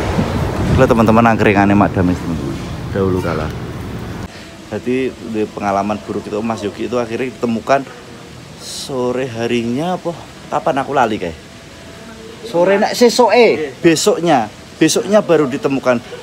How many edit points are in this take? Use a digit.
1